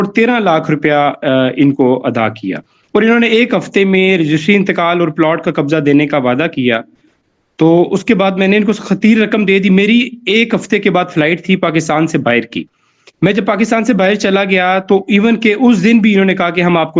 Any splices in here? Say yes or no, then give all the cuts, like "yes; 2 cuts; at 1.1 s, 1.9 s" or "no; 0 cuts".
no; 0 cuts